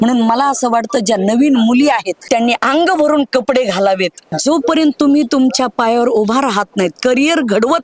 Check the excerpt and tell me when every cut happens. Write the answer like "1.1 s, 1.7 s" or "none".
2.2 s, 4.3 s

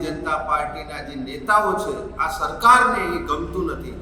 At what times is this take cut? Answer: none

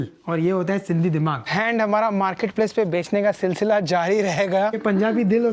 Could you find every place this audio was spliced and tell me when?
1.5 s, 4.8 s

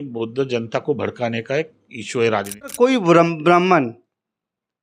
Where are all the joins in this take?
2.7 s

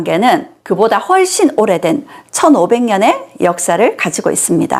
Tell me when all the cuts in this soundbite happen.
none

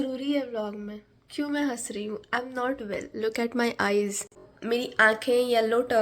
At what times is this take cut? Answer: 4.5 s

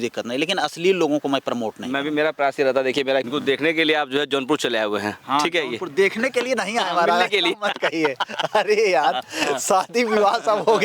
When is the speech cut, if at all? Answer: 3.3 s

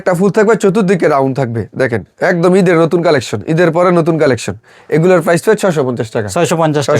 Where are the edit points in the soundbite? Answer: none

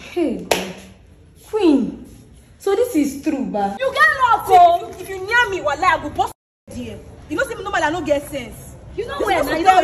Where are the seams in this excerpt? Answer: 3.8 s

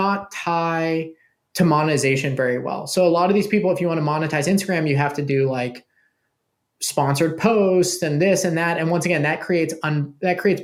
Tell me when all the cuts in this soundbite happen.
none

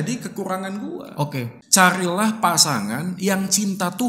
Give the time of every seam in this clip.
1.6 s

